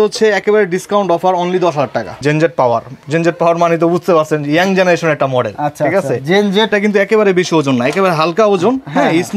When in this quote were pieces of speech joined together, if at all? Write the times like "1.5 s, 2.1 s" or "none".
2.2 s, 6.7 s